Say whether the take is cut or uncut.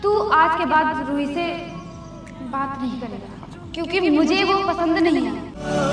uncut